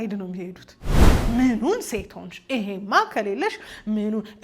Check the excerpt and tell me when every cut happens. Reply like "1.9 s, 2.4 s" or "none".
1.1 s